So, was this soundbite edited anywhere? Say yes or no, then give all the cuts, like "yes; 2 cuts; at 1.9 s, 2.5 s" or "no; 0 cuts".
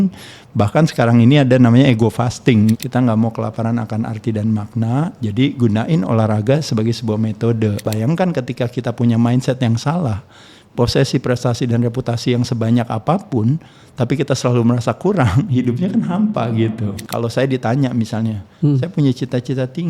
yes; 3 cuts; at 2.7 s, 7.8 s, 17.0 s